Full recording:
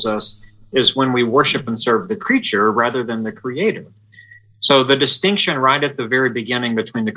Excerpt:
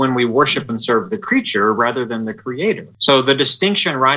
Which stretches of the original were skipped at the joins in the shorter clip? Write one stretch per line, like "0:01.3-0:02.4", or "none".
0:03.9-0:04.5